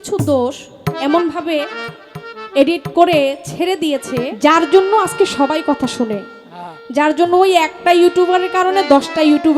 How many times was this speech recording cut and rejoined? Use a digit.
1